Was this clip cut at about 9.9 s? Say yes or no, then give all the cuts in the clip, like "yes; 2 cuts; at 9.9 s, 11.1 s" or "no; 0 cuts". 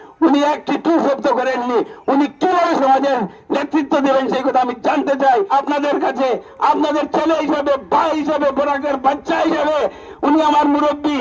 no; 1 cut; at 5.5 s